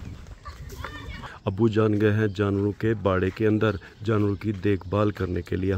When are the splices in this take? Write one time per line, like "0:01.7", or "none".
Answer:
0:01.2